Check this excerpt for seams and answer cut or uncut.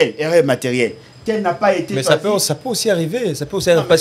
uncut